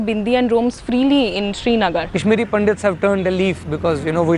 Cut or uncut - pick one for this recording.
cut